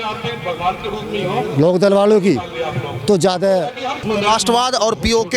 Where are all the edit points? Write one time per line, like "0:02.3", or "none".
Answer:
0:04.0